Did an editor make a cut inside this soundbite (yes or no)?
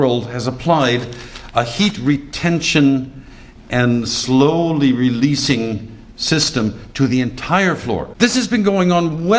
yes